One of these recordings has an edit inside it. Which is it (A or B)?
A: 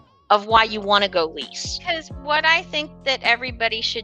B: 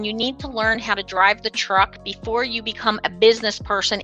A